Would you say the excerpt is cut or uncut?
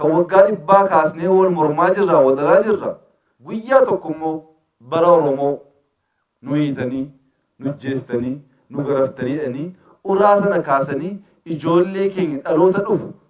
uncut